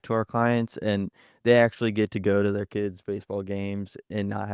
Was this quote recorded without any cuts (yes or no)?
yes